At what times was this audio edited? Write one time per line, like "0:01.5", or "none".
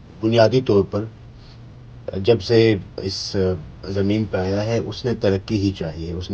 none